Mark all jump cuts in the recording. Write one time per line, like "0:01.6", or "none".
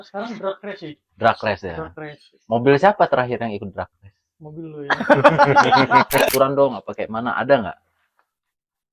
0:06.3